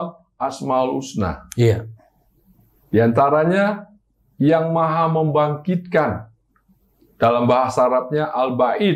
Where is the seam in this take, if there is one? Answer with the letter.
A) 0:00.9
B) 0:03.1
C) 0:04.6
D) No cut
D